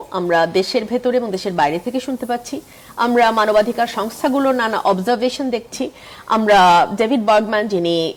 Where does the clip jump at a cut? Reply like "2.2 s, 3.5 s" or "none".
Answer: none